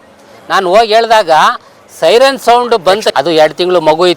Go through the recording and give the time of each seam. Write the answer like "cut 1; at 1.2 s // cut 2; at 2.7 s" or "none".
cut 1; at 3.1 s

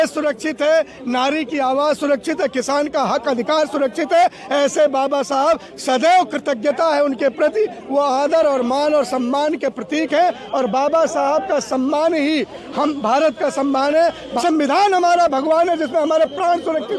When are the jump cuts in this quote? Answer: cut 1; at 14.3 s

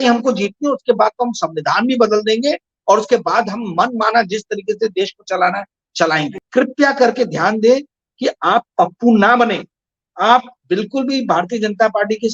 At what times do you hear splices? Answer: cut 1; at 6.4 s

